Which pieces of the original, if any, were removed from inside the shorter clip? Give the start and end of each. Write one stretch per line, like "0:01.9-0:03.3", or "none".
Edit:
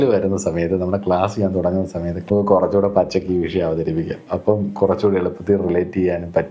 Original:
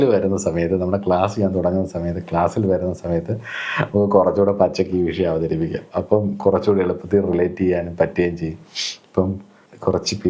0:02.2-0:03.9